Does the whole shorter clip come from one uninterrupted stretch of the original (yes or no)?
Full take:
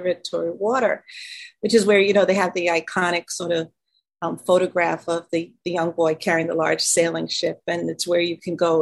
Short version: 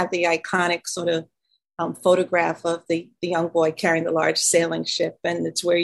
yes